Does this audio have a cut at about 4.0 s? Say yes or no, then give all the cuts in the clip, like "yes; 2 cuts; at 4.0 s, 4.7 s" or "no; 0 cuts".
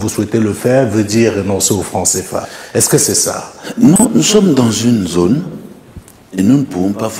no; 0 cuts